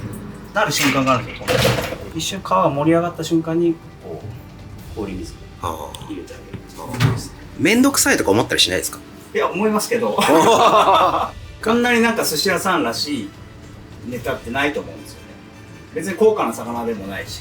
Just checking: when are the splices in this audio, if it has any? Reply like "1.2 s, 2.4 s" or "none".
7.4 s